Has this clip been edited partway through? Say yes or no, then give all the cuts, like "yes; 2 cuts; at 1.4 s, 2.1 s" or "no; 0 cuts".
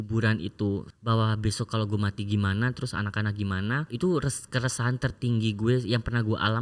yes; 1 cut; at 0.9 s